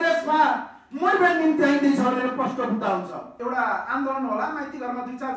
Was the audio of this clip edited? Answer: yes; 1 cut; at 3.3 s

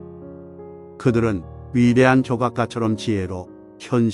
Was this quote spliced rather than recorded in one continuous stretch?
yes; 1 cut; at 1.0 s

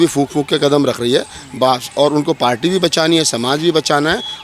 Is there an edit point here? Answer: no; 0 cuts

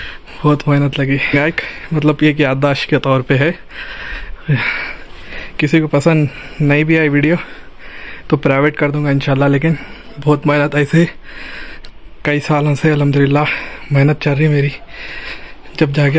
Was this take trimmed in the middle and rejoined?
yes; 1 cut; at 1.3 s

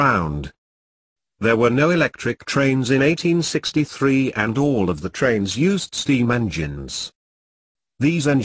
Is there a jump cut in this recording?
no; 0 cuts

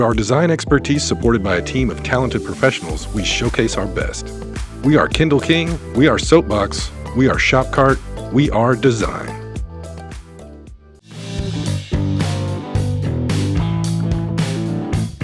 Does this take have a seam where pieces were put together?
yes; 1 cut; at 11.2 s

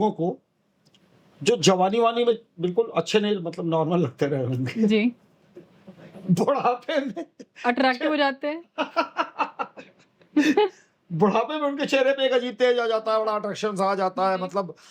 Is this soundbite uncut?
yes; 0 cuts

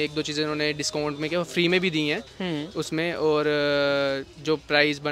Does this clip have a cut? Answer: no; 0 cuts

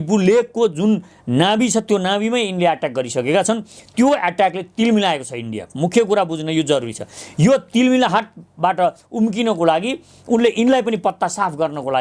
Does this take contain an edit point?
no; 0 cuts

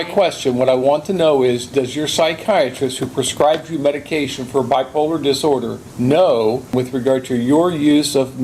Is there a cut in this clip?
yes; 2 cuts; at 5.8 s, 6.7 s

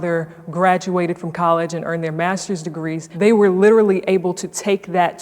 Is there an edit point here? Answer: yes; 1 cut; at 3.0 s

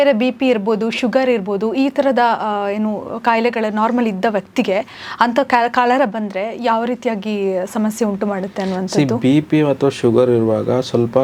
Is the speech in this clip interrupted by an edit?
no; 0 cuts

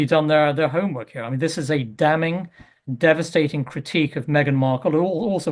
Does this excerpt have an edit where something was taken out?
yes; 1 cut; at 4.2 s

